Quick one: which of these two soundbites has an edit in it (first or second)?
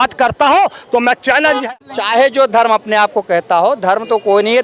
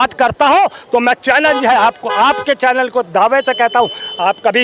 first